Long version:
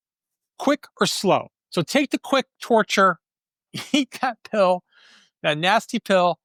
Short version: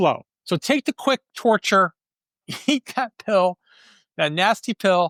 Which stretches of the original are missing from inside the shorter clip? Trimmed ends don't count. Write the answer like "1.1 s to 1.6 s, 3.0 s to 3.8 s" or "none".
none